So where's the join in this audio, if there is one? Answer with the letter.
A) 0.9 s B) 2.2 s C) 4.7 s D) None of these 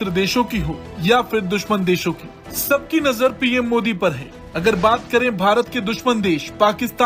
D